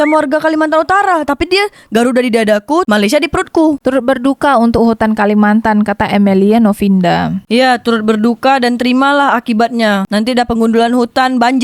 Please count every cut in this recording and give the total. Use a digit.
1